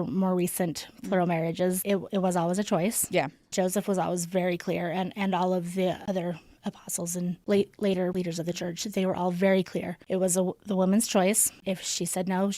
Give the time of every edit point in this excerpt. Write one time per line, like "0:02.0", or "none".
0:06.0
0:07.4
0:08.1
0:10.0
0:11.5